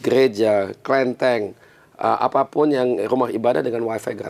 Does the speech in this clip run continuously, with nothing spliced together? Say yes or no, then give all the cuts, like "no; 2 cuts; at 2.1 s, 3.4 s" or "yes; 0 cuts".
yes; 0 cuts